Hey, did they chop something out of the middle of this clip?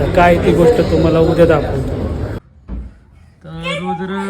yes; 1 cut; at 2.4 s

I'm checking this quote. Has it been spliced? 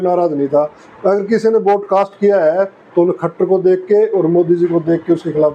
no; 0 cuts

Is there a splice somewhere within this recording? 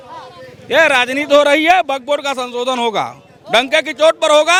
no; 0 cuts

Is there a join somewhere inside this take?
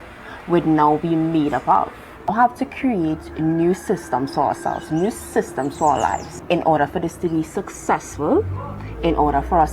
yes; 2 cuts; at 2.3 s, 6.3 s

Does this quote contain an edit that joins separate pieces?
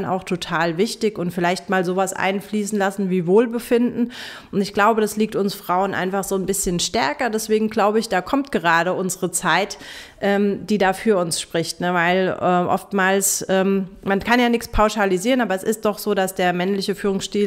no; 0 cuts

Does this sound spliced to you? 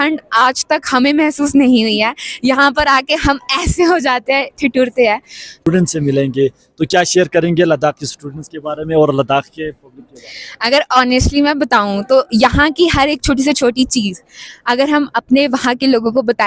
yes; 1 cut; at 5.5 s

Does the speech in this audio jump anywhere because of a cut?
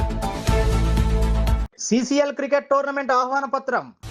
no; 0 cuts

